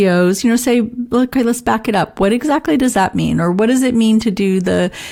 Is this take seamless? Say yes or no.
yes